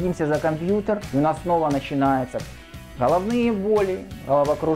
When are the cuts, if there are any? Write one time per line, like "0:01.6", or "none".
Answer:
0:01.0